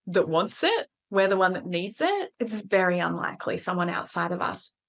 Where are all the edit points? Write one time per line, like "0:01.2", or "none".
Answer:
0:02.3